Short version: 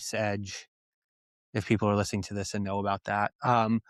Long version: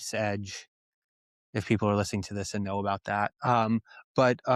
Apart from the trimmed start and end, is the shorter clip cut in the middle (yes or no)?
no